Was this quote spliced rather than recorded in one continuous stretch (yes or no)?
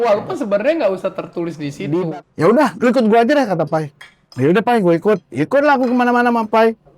yes